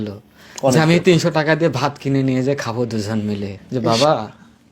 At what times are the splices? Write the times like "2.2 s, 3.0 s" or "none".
3.6 s